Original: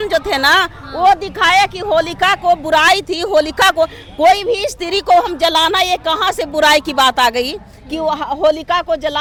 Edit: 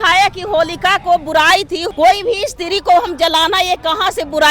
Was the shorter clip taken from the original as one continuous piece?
no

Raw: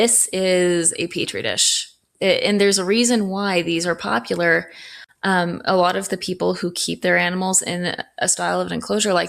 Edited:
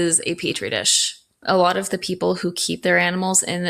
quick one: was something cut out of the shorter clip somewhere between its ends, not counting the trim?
yes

